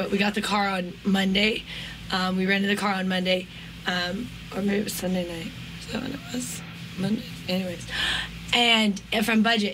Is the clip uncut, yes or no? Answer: yes